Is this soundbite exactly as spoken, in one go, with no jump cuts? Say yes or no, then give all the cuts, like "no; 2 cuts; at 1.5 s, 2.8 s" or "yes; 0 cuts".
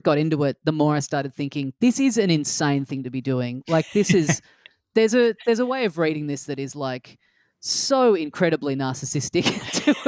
yes; 0 cuts